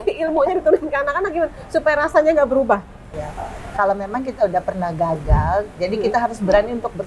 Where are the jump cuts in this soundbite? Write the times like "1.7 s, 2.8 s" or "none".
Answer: 3.2 s